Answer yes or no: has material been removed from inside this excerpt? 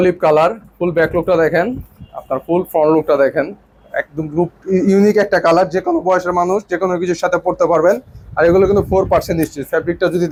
no